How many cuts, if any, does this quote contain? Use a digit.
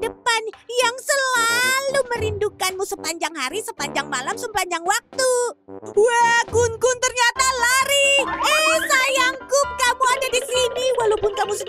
0